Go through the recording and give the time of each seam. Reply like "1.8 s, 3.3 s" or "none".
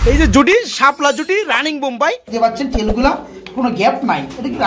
2.3 s